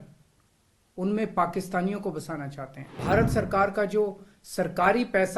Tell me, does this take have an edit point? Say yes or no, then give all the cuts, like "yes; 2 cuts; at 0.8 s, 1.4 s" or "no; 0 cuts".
yes; 1 cut; at 2.8 s